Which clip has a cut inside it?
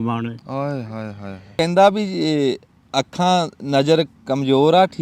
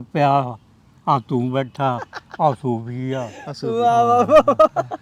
first; 1 cut; at 1.5 s

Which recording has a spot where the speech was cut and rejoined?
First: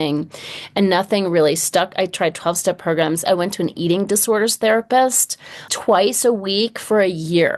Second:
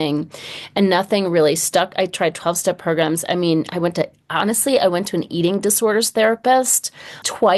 first; 1 cut; at 3.3 s

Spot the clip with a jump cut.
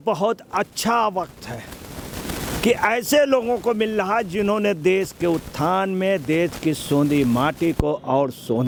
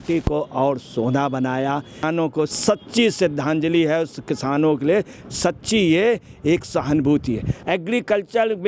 second; 2 cuts; at 2.3 s, 7.5 s

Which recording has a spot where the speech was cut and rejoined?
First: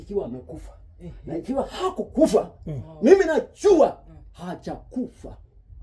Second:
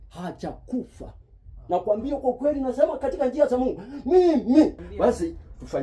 second; 1 cut; at 4.8 s

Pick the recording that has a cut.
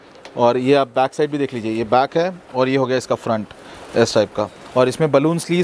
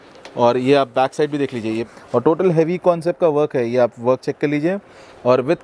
second; 1 cut; at 1.8 s

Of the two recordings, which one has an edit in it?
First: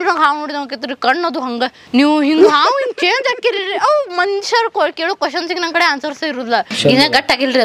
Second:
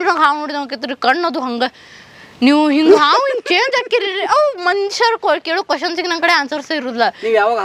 first; 2 cuts; at 1.8 s, 6.7 s

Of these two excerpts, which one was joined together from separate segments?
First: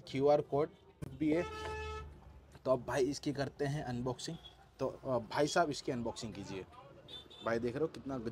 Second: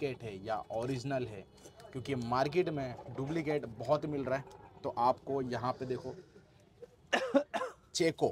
first; 1 cut; at 1.1 s

